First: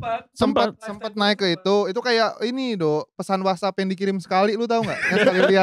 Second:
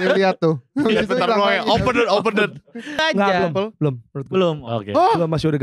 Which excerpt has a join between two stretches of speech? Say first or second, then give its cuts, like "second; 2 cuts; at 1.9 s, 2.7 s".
second; 1 cut; at 3.0 s